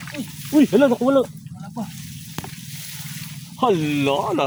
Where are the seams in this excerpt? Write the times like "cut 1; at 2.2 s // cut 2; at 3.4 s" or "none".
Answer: none